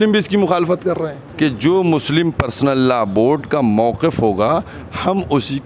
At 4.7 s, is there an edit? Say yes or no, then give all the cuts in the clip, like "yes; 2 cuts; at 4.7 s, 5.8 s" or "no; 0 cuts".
no; 1 cut; at 1.2 s